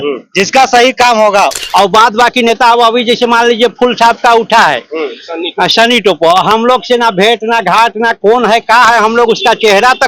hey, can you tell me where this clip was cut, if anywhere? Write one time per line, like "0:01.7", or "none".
0:01.6